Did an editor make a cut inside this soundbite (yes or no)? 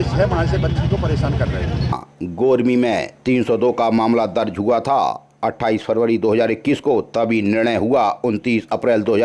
yes